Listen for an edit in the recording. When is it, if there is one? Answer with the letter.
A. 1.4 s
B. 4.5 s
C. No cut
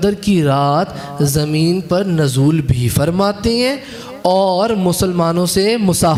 C